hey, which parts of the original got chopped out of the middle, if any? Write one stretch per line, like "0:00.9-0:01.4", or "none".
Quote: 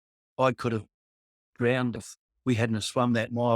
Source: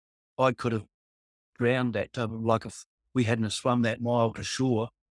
0:01.9-0:02.6